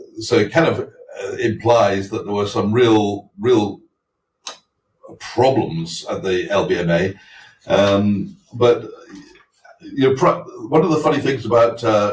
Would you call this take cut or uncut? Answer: uncut